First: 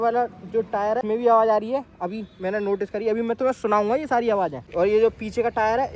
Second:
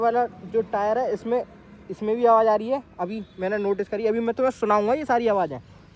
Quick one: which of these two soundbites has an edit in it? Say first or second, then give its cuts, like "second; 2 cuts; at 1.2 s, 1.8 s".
first; 2 cuts; at 1.0 s, 4.6 s